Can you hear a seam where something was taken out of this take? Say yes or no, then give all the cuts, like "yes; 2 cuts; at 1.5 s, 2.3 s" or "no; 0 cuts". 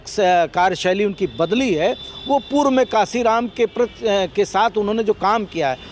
no; 0 cuts